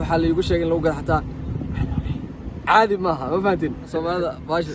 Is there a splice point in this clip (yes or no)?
yes